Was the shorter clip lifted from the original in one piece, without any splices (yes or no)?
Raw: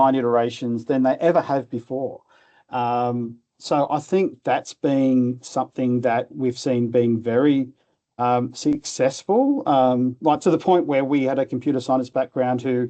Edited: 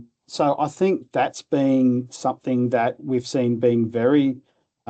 yes